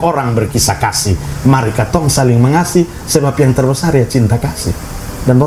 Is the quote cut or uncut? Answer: uncut